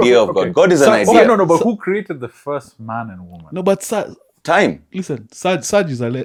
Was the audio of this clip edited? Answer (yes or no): no